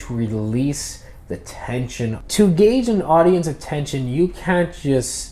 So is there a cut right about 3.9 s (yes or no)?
no